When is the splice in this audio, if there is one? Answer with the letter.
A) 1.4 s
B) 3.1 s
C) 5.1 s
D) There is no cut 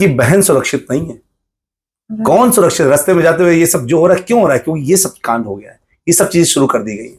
D